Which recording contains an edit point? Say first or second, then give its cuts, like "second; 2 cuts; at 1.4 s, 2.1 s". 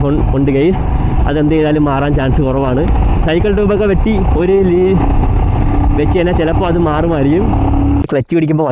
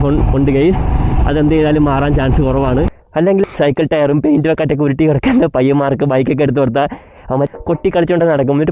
second; 2 cuts; at 3.3 s, 7.5 s